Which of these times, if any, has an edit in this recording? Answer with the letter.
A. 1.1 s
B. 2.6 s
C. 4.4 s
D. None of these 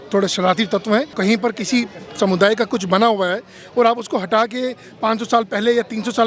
A